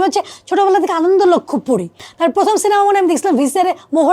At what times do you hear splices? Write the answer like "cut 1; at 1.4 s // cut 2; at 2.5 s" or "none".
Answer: cut 1; at 2.0 s